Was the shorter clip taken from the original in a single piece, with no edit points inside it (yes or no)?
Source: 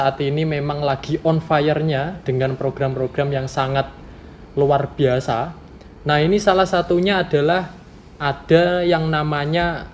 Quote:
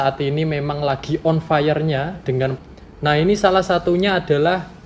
no